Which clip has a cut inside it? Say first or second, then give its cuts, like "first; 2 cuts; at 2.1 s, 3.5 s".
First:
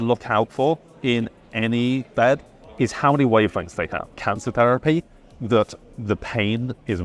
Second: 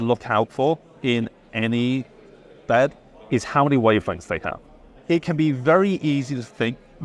first; 2 cuts; at 2.1 s, 4.2 s